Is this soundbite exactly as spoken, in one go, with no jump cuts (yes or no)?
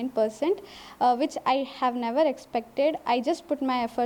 yes